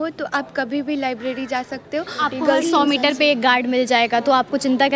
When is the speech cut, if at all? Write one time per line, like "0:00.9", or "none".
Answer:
0:02.1